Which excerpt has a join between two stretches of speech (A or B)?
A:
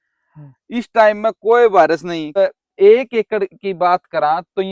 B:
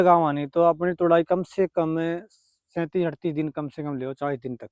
A